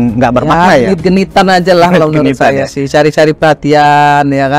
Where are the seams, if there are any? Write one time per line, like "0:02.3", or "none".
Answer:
none